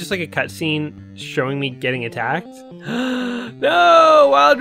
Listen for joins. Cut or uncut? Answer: uncut